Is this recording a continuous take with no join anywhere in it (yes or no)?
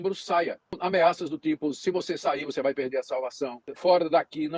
no